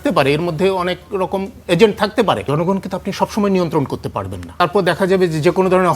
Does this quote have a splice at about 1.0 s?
no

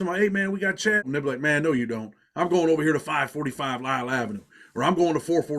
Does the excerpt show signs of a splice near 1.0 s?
yes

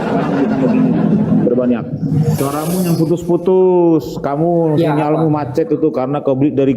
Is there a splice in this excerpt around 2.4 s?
yes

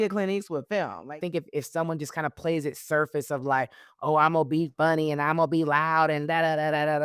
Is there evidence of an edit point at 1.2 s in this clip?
yes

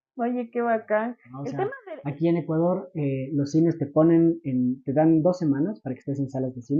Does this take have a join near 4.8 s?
no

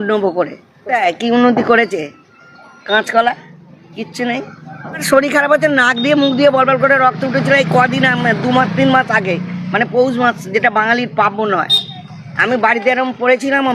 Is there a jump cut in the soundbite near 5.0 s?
yes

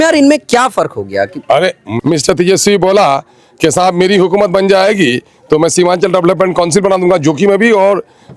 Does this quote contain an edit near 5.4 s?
no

